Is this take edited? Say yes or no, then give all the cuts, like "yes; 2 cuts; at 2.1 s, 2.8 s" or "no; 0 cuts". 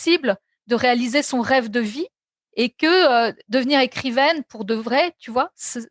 no; 0 cuts